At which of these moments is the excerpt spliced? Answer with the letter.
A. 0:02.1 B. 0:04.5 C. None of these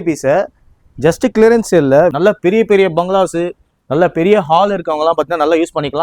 A